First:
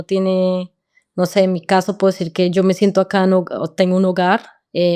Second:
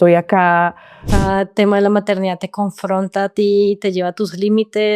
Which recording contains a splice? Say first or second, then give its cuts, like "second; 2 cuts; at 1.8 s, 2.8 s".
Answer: second; 1 cut; at 1.1 s